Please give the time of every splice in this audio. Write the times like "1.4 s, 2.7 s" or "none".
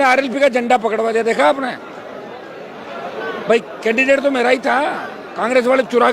none